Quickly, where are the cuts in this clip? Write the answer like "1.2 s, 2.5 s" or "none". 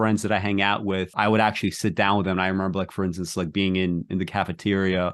1.1 s